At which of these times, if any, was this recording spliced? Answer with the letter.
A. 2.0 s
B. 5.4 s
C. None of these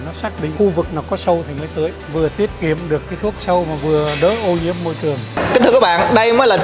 B